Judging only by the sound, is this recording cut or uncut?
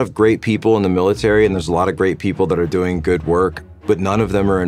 uncut